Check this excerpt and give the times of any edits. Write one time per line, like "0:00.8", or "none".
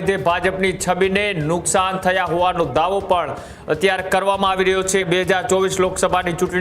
0:05.0